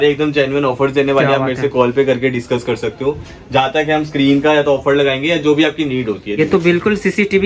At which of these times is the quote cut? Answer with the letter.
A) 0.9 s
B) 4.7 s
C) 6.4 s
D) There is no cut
C